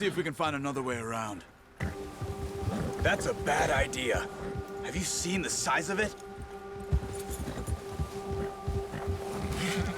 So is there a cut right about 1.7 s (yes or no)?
yes